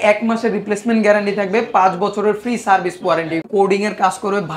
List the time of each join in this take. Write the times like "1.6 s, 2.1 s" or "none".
3.5 s